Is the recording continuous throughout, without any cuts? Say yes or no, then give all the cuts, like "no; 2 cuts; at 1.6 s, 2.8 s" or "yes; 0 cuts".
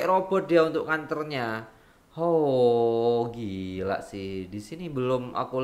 yes; 0 cuts